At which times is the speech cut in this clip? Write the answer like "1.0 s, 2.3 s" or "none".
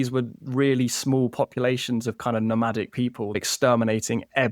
3.4 s